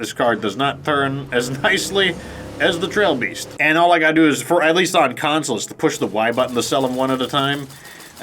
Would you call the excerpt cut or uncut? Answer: cut